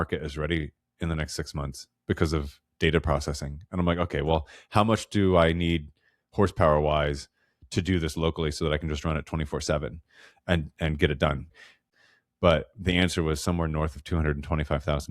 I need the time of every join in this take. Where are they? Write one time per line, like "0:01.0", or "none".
0:11.8